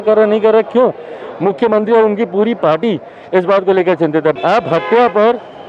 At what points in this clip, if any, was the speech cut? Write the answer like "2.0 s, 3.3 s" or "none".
4.3 s